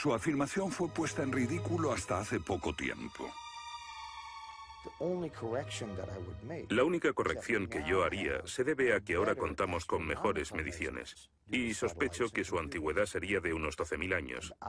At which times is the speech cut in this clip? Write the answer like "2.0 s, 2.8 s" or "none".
none